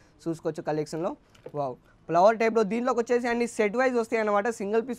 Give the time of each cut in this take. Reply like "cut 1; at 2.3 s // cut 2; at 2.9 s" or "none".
none